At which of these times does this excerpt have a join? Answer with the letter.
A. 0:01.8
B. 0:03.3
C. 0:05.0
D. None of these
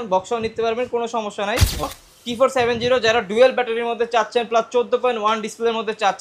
A